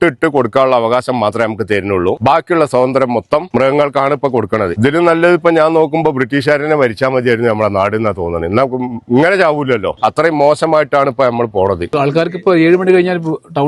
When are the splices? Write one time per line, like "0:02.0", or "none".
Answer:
0:02.2
0:03.5
0:04.7
0:09.9
0:11.9